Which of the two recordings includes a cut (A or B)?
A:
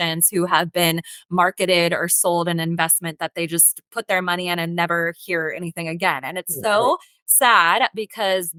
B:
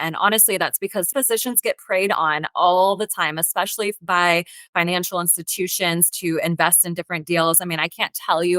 B